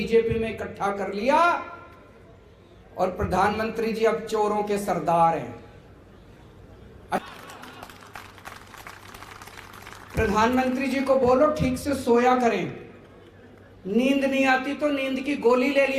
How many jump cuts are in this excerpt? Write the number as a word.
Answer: one